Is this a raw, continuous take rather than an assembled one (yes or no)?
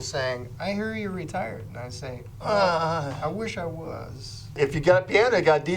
no